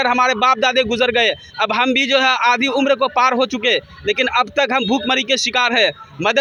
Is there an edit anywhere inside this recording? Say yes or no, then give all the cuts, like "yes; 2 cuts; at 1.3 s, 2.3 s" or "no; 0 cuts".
no; 0 cuts